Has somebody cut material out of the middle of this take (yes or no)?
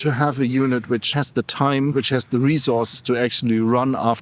yes